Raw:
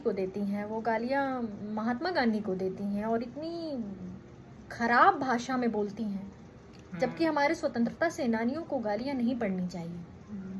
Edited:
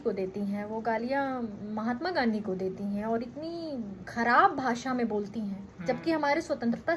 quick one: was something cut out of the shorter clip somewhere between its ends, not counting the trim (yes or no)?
yes